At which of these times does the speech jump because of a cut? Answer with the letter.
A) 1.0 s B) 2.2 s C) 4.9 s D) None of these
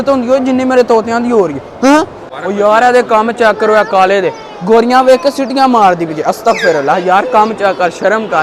B